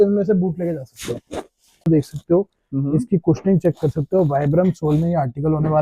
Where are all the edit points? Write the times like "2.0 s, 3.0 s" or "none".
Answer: 1.9 s